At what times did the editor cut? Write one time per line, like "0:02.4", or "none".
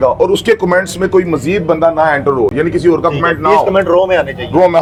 none